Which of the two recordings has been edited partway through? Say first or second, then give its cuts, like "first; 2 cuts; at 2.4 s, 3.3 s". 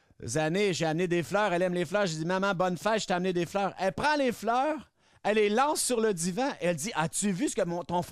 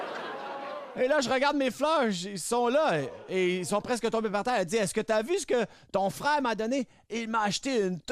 second; 1 cut; at 0.9 s